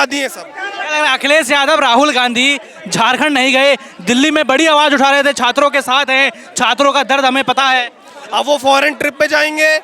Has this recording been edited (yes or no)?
no